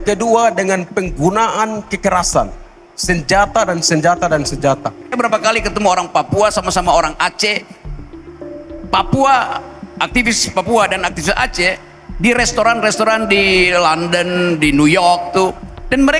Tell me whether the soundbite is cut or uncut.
cut